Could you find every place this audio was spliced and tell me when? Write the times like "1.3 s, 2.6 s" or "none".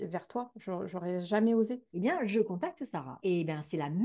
1.8 s